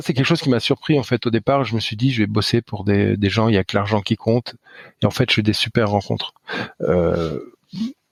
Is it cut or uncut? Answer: uncut